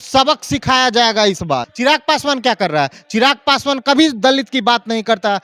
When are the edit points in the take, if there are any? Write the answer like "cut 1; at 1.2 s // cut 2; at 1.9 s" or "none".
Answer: cut 1; at 1.7 s